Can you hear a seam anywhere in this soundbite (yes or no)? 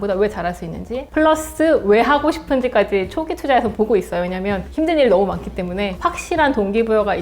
yes